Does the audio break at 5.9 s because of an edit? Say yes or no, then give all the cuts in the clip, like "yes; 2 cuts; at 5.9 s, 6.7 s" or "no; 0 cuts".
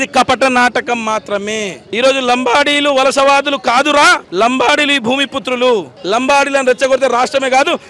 yes; 2 cuts; at 1.8 s, 5.9 s